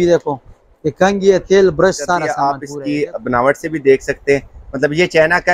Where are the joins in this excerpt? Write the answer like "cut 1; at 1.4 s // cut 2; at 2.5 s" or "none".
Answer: cut 1; at 2.3 s